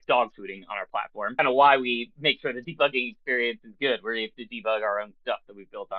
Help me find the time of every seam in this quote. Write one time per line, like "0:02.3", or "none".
0:01.3